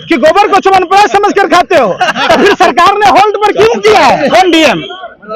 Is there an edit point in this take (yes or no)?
yes